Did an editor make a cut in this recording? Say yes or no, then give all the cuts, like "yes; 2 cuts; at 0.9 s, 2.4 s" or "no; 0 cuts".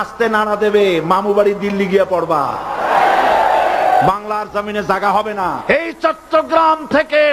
yes; 1 cut; at 5.6 s